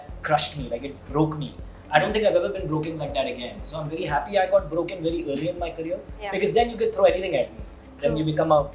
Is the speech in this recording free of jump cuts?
yes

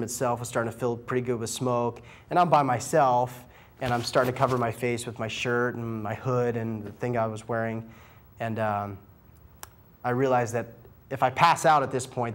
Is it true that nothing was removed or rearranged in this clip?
yes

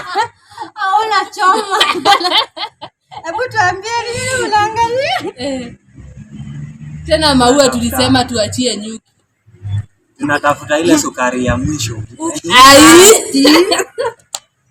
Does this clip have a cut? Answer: no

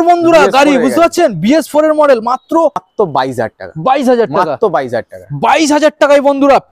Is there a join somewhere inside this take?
yes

